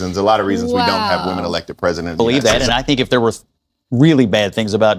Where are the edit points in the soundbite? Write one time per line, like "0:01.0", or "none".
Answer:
0:02.1